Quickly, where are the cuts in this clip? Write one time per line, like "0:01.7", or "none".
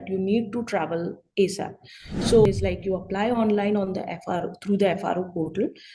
0:02.5